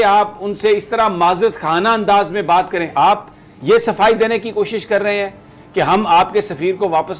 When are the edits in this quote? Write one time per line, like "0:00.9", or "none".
0:02.9